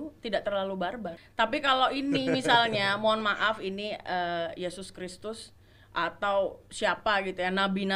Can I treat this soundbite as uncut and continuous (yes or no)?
no